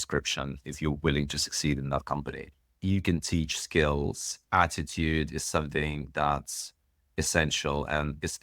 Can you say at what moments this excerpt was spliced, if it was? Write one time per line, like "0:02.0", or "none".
0:02.7

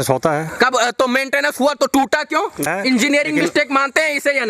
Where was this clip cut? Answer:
0:02.7

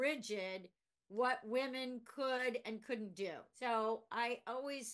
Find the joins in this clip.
0:03.5

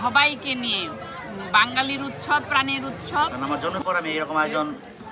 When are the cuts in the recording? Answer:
0:03.3

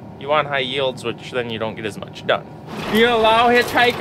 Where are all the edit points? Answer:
0:02.6

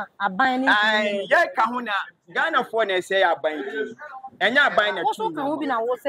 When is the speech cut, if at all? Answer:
none

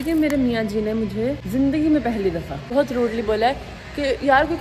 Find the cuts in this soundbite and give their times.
none

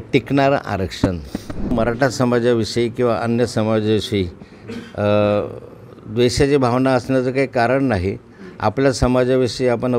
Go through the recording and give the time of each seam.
0:01.7

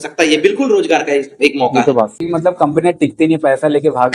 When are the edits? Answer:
0:02.2

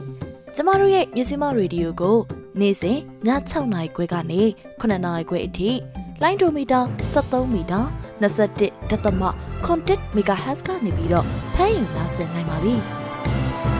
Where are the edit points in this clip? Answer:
0:12.9

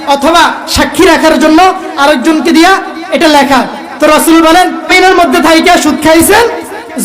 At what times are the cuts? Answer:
0:04.9

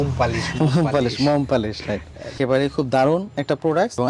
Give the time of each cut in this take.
none

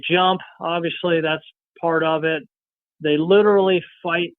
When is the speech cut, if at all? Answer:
0:02.8

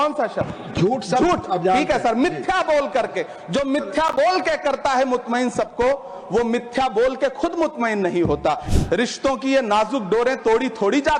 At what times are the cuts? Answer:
0:08.7

